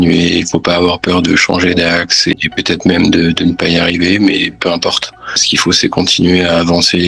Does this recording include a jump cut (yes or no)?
yes